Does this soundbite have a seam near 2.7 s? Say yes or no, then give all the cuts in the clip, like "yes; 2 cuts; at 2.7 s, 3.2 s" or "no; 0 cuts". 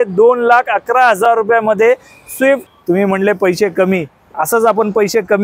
yes; 1 cut; at 2.7 s